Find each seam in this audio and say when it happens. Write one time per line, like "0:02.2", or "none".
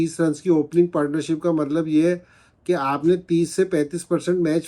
none